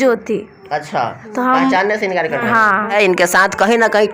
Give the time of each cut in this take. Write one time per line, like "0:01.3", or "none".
0:02.9